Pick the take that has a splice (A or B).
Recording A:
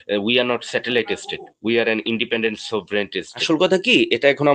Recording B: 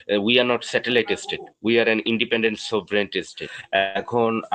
A